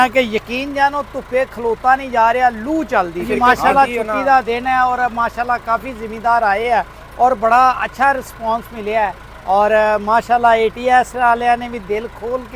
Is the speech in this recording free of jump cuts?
no; 1 cut; at 3.3 s

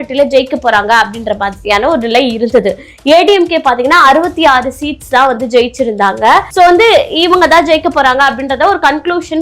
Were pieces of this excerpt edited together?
yes; 1 cut; at 6.5 s

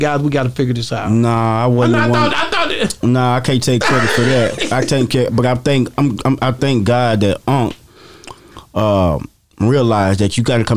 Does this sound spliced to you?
no; 0 cuts

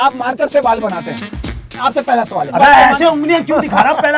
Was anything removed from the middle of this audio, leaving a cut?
yes; 2 cuts; at 1.3 s, 2.5 s

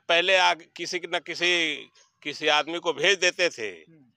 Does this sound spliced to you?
no; 0 cuts

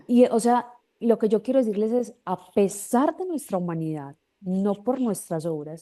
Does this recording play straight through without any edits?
yes; 0 cuts

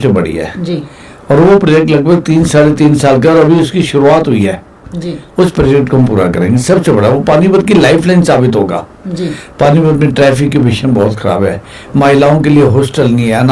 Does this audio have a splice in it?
no; 0 cuts

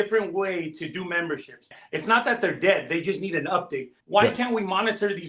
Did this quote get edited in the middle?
yes; 2 cuts; at 1.8 s, 4.0 s

